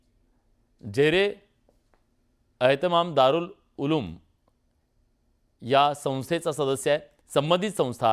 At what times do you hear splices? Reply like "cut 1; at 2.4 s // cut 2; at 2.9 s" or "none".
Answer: cut 1; at 3.3 s